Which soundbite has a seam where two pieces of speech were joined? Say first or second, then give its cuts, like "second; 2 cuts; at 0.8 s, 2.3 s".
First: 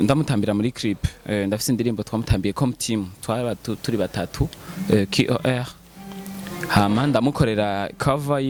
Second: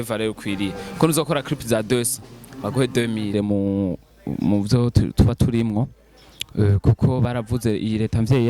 second; 1 cut; at 3.3 s